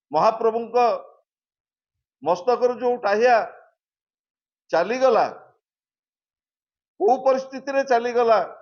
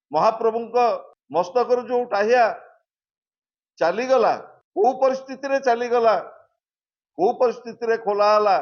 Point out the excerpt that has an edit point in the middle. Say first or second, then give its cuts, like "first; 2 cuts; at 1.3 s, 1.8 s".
second; 2 cuts; at 1.1 s, 4.6 s